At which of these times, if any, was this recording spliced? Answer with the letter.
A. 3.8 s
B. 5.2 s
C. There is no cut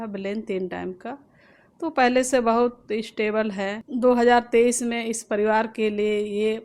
A